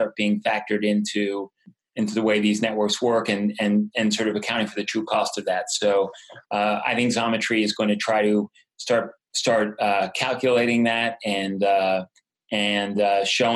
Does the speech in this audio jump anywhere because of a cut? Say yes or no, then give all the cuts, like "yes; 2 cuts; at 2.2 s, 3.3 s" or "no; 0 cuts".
yes; 1 cut; at 1.8 s